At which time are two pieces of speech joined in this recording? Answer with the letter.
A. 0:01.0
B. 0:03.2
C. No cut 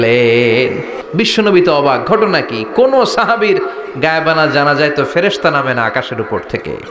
A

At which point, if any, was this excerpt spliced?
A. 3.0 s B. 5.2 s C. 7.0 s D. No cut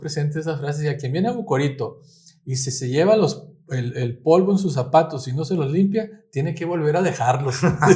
D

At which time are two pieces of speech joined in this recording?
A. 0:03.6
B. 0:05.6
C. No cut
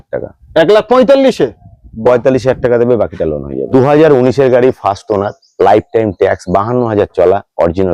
A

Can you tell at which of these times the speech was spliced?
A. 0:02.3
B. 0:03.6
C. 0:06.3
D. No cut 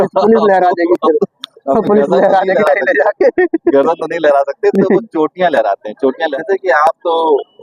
C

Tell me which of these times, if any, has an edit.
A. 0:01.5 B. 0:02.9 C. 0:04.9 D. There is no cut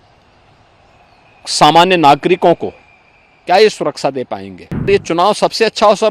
C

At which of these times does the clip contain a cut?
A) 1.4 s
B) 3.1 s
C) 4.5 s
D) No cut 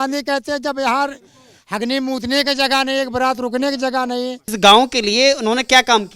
C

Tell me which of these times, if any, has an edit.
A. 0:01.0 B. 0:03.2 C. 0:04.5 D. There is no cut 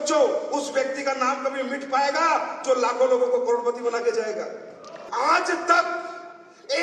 C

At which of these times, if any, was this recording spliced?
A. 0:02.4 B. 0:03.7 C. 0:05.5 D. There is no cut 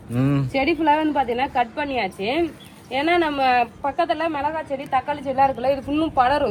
D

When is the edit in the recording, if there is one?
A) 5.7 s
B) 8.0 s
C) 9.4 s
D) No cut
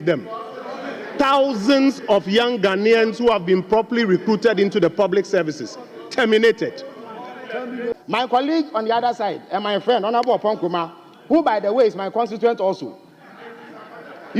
B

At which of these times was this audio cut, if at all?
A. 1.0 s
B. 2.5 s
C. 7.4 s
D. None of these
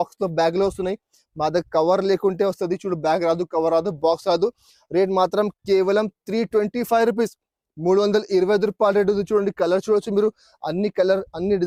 D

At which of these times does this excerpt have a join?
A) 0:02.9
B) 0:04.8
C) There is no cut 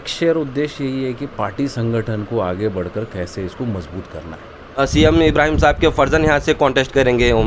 B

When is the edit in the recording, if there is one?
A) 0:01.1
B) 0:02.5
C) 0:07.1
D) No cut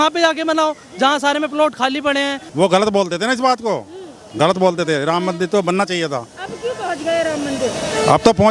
B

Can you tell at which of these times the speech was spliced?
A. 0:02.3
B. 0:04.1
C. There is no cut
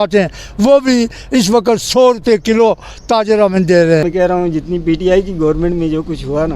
B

